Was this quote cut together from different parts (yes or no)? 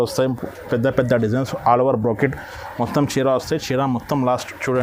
no